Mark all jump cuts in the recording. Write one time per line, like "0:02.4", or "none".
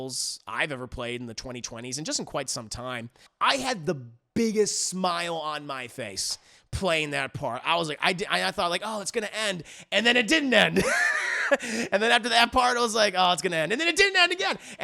0:03.2